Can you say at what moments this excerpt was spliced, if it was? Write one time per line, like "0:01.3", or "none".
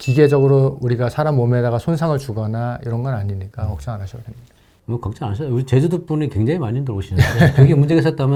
none